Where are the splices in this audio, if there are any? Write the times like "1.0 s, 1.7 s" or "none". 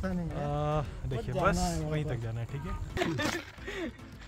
3.0 s